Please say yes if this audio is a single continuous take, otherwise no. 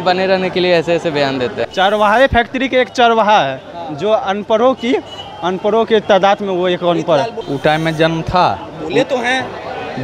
no